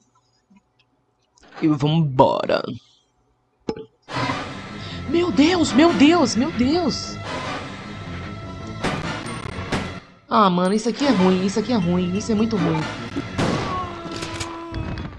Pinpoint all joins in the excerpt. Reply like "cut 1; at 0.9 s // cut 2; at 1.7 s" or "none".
cut 1; at 13.2 s